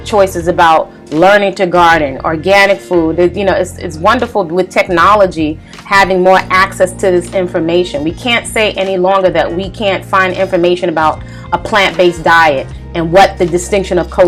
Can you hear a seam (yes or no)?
no